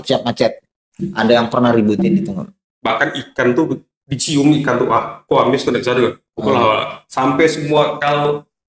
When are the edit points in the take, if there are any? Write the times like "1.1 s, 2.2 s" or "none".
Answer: 2.6 s

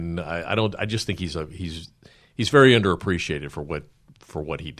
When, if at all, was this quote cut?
none

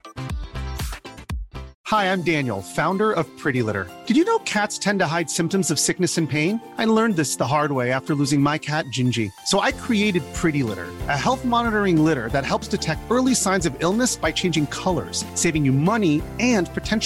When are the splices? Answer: none

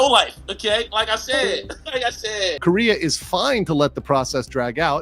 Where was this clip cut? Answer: 2.6 s

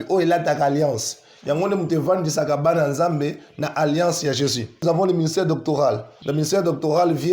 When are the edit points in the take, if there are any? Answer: 4.8 s, 6.1 s

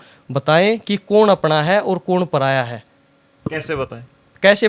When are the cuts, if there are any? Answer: none

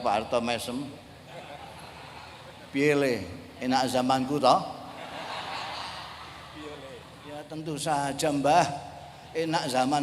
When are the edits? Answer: 7.5 s

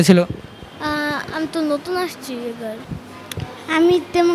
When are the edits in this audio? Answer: 2.8 s

